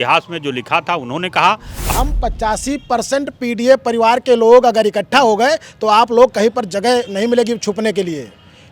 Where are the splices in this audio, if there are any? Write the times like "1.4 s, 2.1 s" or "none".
1.7 s